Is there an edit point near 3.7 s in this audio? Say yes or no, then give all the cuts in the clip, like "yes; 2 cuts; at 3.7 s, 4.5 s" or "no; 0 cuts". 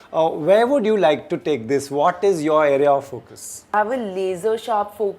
yes; 1 cut; at 3.7 s